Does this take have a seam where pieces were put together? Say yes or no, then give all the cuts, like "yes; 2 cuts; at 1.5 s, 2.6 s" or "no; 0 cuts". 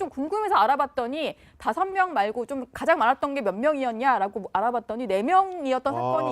yes; 1 cut; at 4.6 s